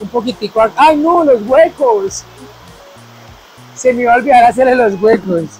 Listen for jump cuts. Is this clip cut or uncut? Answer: uncut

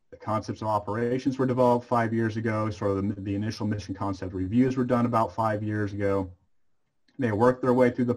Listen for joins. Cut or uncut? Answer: uncut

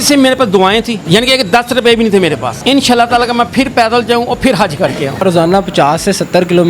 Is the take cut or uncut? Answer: cut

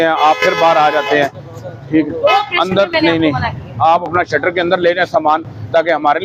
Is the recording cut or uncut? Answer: uncut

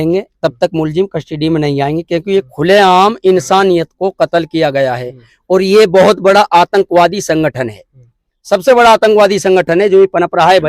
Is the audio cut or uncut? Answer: uncut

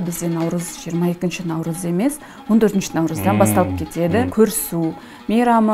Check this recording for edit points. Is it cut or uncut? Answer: cut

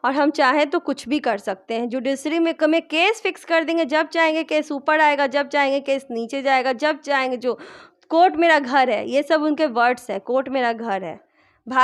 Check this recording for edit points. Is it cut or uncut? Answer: uncut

